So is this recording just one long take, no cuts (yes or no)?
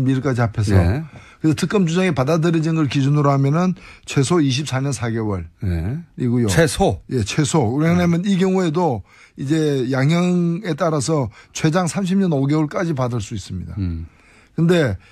no